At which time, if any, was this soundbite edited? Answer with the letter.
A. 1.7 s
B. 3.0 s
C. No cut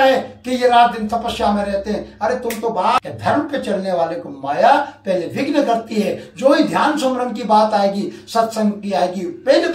B